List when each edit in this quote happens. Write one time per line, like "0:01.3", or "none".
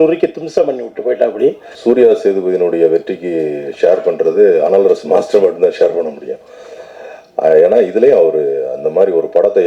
0:01.7

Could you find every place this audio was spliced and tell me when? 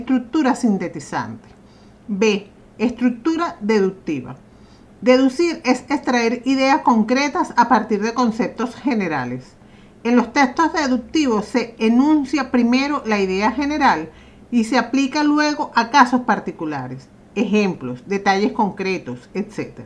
none

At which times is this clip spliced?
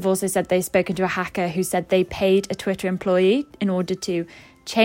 none

